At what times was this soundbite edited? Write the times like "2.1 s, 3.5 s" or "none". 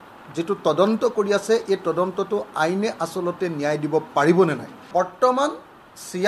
4.9 s